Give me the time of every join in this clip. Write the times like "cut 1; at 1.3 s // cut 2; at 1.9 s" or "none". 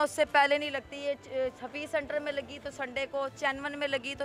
none